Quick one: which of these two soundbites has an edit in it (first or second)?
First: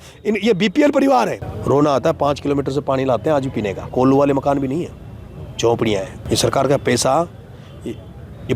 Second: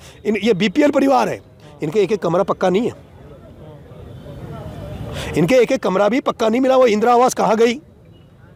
first